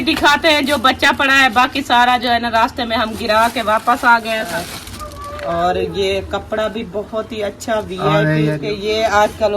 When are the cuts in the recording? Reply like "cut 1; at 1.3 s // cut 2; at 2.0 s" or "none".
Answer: cut 1; at 4.5 s // cut 2; at 8.6 s